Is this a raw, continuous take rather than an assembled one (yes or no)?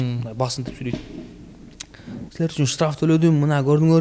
yes